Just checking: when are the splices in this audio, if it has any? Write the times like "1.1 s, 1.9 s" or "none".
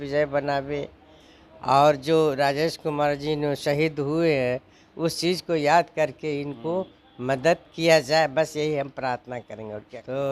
9.4 s